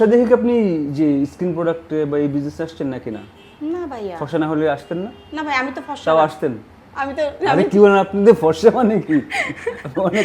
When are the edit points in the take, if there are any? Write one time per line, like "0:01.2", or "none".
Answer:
none